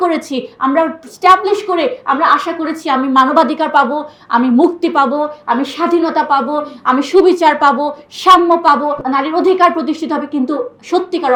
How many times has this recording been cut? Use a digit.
0